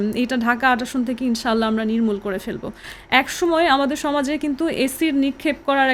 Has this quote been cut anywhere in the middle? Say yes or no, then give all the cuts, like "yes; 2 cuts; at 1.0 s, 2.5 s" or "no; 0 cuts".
no; 0 cuts